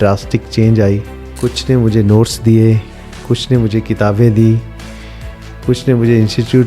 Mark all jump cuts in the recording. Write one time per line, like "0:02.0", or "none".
0:01.2